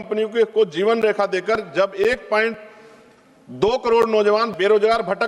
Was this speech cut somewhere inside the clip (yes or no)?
no